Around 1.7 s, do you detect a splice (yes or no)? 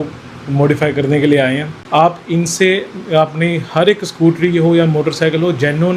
yes